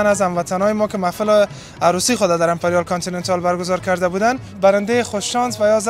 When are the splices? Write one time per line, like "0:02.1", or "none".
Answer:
0:04.5

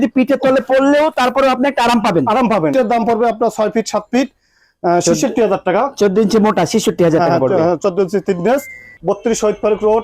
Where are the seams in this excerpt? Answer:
0:02.7
0:08.9

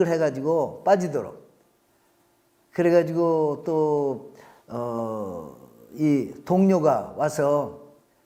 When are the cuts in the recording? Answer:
none

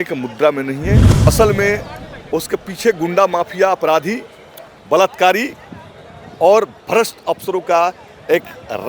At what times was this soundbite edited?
0:01.1

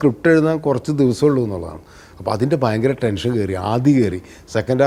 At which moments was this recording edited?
none

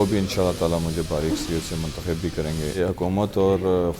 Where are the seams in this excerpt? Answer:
0:02.8

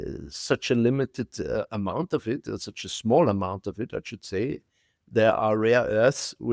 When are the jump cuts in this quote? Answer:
0:05.0

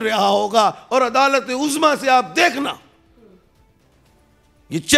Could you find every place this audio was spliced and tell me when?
none

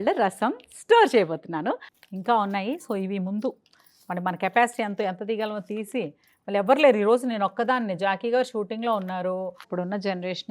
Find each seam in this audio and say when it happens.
0:02.0
0:09.7

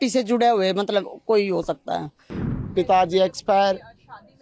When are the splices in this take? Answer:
0:02.5

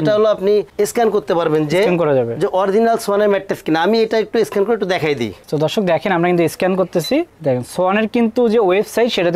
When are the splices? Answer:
none

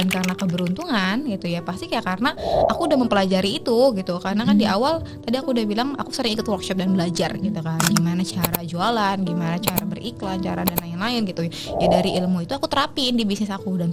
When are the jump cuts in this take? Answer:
none

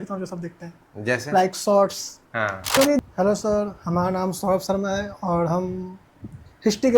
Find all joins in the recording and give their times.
0:03.0

